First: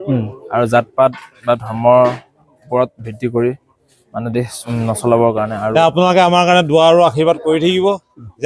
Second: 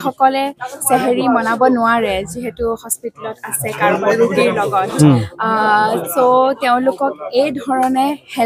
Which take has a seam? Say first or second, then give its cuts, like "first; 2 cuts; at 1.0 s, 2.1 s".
first; 2 cuts; at 4.6 s, 5.7 s